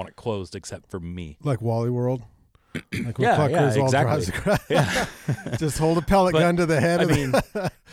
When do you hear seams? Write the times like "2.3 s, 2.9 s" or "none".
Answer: none